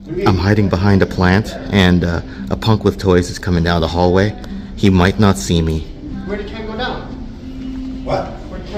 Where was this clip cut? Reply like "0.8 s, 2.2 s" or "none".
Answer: none